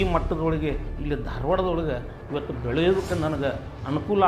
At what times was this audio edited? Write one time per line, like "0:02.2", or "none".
none